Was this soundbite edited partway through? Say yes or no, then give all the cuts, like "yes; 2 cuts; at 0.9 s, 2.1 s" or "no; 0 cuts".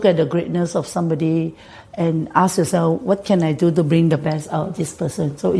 no; 0 cuts